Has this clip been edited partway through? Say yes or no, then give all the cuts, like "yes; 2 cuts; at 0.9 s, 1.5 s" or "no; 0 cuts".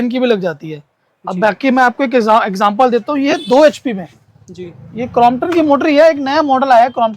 no; 0 cuts